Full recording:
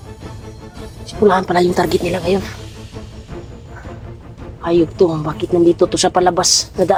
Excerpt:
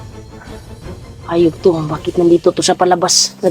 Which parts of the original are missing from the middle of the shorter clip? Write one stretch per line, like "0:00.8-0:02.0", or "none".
0:01.2-0:04.3